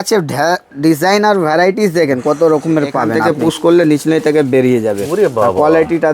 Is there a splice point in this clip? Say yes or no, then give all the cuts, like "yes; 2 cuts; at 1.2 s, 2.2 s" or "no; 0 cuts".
yes; 1 cut; at 3.2 s